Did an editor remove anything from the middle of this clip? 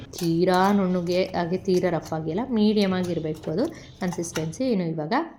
no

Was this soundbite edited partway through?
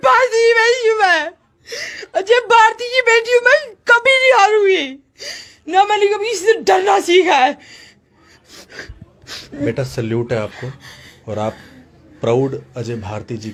no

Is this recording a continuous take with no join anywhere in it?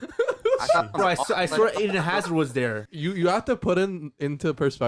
no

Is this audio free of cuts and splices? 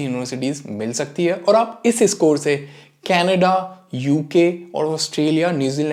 yes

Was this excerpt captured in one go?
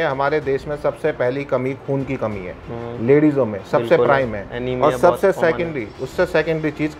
yes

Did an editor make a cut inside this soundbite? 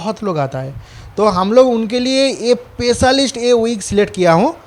no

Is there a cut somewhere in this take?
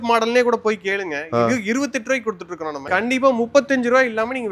yes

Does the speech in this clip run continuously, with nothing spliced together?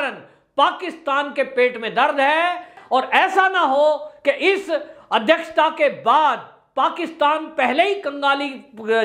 no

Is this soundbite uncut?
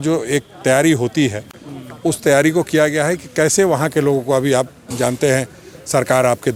yes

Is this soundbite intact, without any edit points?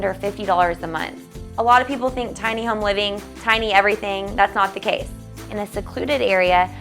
no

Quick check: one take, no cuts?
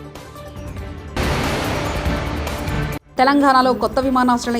no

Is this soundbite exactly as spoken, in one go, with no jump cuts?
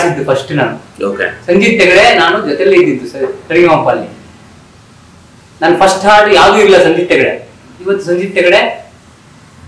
yes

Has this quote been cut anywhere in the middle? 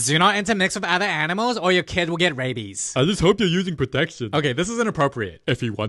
no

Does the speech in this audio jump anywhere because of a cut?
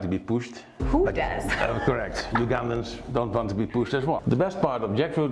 yes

